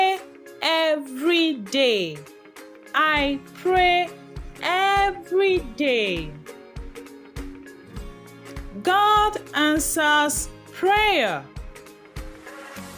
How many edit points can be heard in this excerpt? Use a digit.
2